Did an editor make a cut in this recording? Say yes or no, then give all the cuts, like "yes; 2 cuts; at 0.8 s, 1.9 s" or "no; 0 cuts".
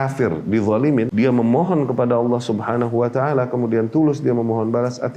yes; 1 cut; at 1.1 s